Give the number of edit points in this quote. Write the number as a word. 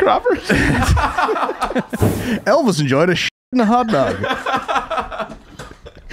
one